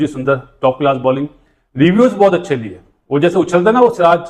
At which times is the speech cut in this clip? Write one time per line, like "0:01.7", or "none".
none